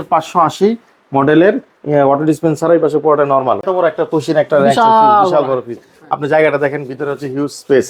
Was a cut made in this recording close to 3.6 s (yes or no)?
yes